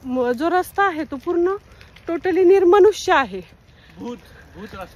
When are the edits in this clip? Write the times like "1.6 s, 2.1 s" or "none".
none